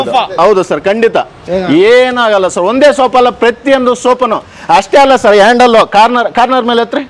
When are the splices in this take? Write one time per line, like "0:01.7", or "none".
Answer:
0:01.4